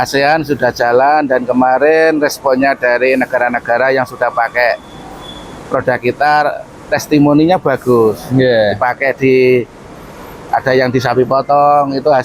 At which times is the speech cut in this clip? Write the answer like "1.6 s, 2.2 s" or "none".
none